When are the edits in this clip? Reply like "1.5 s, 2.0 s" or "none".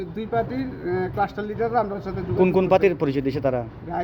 none